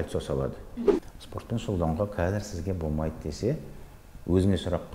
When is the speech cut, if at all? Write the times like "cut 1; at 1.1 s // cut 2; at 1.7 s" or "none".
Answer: cut 1; at 1.0 s